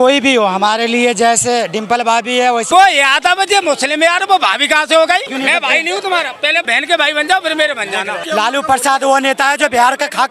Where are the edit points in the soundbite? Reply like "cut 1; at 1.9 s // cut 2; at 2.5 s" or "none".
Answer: cut 1; at 2.7 s // cut 2; at 5.3 s // cut 3; at 6.6 s // cut 4; at 8.2 s